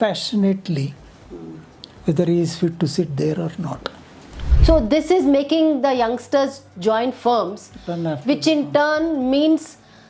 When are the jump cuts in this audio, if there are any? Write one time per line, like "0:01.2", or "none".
0:04.5